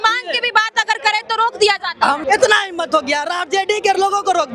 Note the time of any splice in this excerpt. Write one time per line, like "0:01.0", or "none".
0:02.2